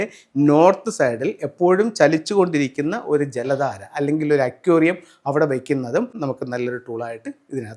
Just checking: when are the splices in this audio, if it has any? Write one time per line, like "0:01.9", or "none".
0:06.2